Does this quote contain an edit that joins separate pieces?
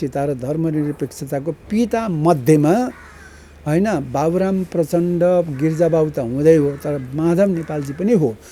no; 0 cuts

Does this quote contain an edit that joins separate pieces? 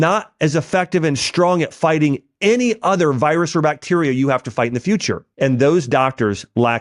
yes; 1 cut; at 5.2 s

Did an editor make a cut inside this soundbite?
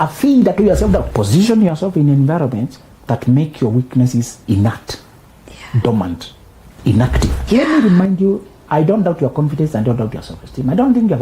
yes; 3 cuts; at 1.1 s, 4.4 s, 7.3 s

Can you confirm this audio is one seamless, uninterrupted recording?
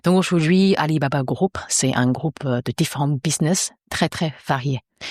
yes; 0 cuts

